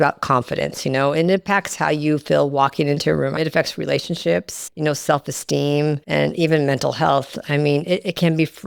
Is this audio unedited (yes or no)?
no